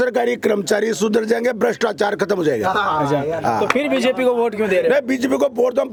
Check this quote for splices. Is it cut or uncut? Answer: uncut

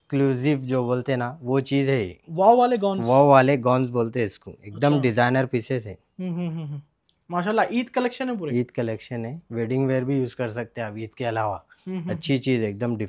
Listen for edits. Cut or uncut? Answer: uncut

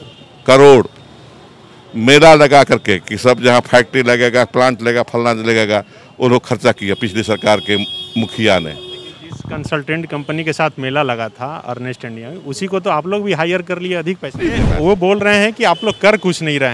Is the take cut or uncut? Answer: cut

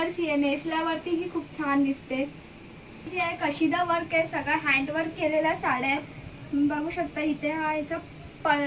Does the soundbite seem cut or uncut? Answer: cut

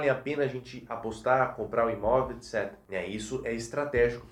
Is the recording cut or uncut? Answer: cut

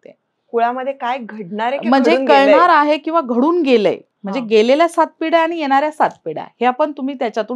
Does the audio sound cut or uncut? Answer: uncut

